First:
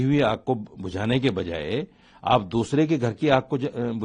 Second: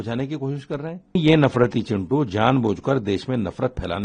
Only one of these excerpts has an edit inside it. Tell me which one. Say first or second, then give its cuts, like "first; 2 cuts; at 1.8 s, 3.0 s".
second; 1 cut; at 1.2 s